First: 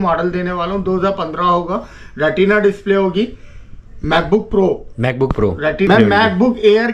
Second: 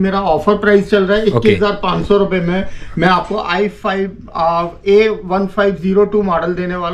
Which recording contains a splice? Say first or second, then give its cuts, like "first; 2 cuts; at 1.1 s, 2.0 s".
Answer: first; 1 cut; at 5.9 s